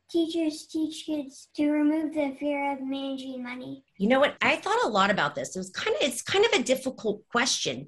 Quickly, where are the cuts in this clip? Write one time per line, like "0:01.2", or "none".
0:01.4
0:03.8
0:04.4